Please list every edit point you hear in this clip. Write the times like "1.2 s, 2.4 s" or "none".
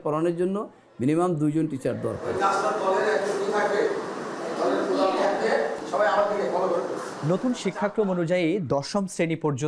none